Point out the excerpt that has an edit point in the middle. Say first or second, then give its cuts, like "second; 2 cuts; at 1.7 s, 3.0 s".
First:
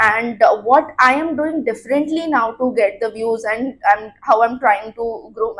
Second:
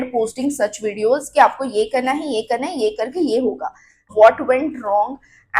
second; 1 cut; at 4.1 s